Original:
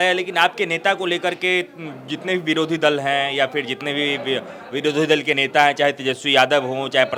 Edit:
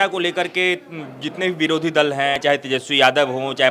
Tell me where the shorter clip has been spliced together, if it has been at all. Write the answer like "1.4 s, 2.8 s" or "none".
2.4 s